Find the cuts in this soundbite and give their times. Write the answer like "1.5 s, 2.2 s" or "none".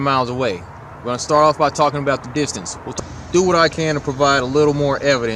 none